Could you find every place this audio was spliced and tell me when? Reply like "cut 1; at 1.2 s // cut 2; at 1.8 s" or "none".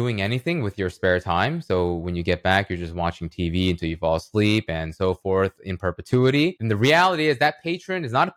cut 1; at 6.6 s